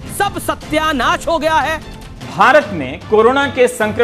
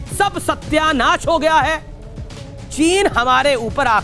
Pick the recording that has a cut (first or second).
first